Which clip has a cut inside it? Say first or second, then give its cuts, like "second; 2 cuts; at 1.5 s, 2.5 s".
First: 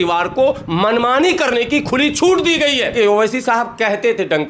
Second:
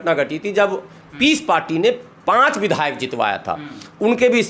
first; 1 cut; at 2.9 s